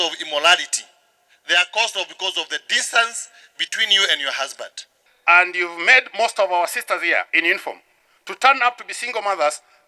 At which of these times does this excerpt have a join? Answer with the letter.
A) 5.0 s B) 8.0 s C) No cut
A